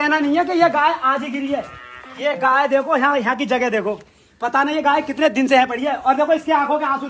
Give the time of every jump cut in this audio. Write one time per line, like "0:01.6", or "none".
none